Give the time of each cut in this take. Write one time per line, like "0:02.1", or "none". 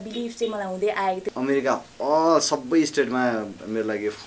0:01.3